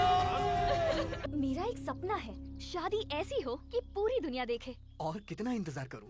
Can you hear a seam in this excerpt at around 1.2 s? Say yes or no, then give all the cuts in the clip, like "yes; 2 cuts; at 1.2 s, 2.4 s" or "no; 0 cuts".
yes; 1 cut; at 1.2 s